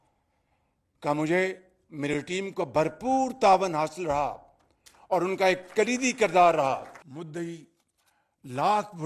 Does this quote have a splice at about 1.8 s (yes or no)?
no